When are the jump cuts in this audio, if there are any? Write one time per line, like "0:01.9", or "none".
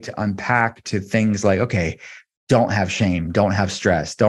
none